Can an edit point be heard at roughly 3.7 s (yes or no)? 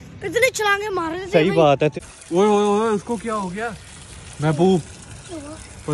no